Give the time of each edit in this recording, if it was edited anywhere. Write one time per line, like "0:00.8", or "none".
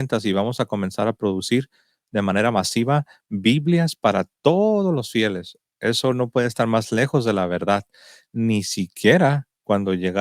none